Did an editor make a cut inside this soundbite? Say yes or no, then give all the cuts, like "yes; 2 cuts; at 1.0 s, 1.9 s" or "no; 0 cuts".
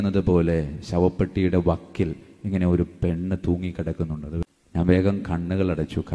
yes; 1 cut; at 4.5 s